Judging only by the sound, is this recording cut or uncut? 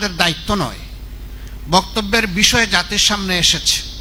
uncut